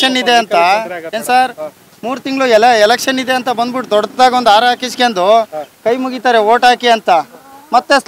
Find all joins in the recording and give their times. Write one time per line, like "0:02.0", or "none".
none